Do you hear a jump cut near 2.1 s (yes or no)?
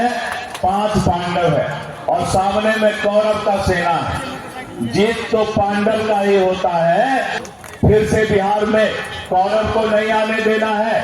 no